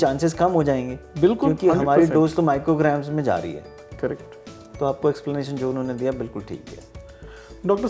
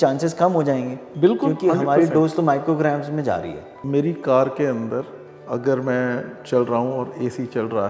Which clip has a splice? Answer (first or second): second